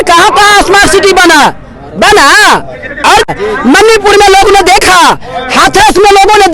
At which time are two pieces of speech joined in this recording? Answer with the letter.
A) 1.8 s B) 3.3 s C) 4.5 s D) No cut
B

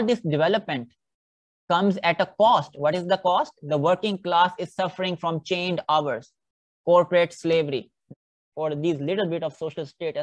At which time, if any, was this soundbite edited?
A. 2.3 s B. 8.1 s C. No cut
B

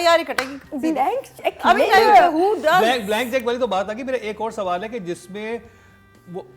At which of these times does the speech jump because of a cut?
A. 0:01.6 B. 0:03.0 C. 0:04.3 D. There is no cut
D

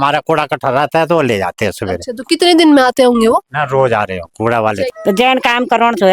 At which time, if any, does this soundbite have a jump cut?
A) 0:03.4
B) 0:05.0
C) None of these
B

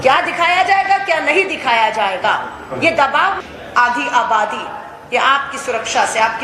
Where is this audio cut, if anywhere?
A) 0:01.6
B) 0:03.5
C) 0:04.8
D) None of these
B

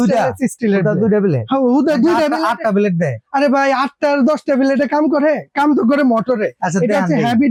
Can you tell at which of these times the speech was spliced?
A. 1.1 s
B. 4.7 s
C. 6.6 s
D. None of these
D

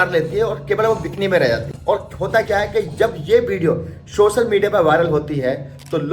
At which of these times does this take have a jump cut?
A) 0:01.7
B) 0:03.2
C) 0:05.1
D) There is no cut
A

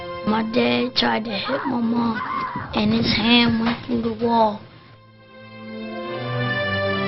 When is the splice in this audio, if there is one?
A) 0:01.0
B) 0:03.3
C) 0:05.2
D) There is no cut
D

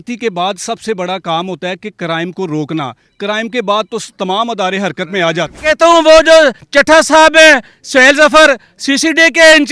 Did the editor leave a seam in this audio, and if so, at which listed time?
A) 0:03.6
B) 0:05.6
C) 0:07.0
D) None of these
B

